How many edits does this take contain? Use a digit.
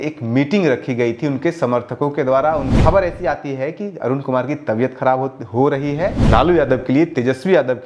2